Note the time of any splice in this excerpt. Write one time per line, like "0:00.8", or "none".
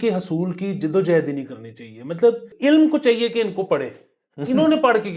0:02.5